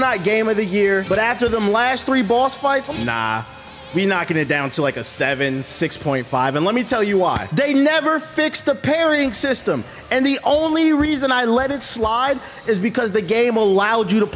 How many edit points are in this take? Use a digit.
3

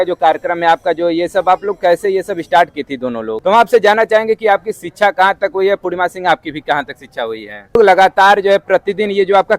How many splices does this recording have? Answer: 2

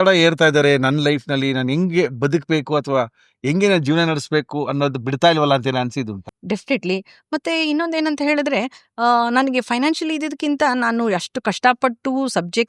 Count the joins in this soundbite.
1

